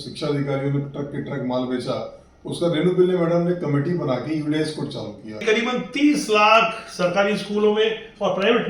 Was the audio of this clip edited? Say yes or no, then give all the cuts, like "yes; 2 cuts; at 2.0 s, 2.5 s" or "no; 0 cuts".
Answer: yes; 1 cut; at 5.4 s